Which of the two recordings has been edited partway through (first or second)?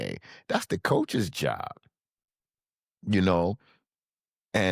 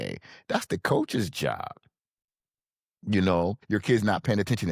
second